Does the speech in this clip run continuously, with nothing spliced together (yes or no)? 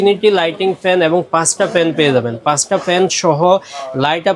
yes